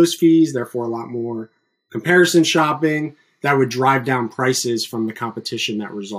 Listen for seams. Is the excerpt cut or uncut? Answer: uncut